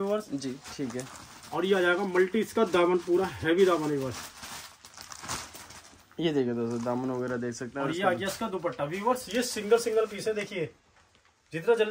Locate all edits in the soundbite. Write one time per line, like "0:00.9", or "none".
none